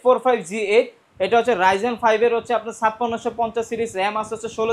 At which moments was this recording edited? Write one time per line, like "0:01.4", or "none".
none